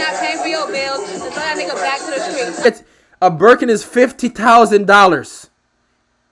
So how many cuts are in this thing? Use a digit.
1